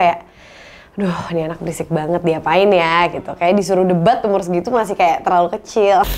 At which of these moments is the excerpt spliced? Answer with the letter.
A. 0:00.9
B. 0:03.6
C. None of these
C